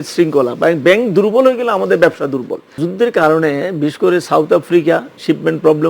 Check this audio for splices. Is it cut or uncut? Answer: cut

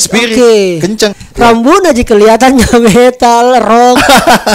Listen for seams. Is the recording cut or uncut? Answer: cut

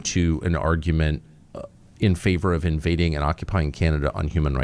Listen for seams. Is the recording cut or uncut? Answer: uncut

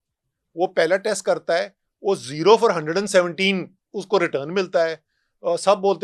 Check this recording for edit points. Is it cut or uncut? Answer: uncut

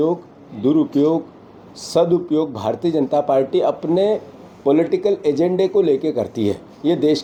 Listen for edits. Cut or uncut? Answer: uncut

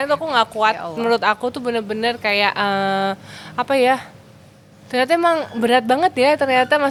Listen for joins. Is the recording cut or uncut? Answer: uncut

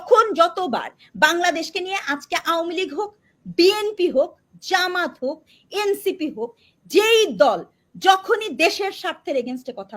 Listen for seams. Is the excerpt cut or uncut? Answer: uncut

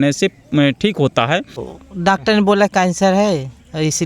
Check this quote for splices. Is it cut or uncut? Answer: cut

